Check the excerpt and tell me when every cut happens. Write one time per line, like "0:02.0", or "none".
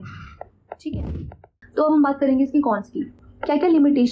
0:01.6